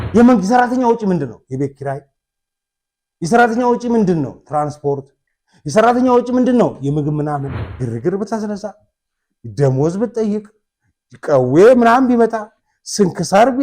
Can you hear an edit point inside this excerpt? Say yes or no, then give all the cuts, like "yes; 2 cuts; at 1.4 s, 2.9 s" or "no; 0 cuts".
yes; 1 cut; at 7.5 s